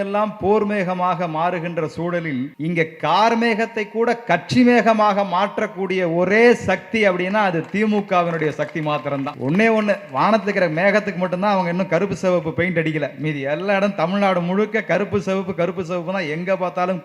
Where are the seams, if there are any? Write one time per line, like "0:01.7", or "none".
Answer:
0:02.5
0:09.3